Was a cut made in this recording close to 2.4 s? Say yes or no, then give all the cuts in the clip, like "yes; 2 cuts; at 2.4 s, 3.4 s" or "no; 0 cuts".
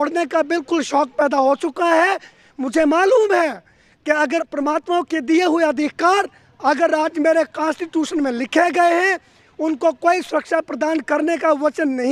no; 0 cuts